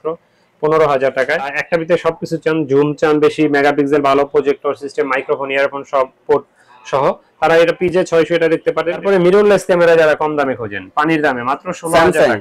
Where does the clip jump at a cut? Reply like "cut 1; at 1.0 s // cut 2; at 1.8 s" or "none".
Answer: cut 1; at 1.6 s // cut 2; at 9.0 s